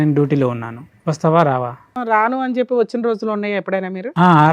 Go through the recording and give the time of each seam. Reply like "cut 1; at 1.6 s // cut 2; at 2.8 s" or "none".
cut 1; at 1.9 s